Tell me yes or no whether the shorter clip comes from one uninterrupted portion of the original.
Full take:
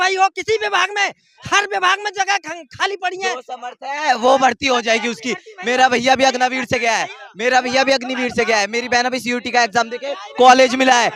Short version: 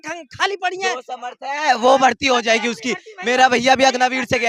yes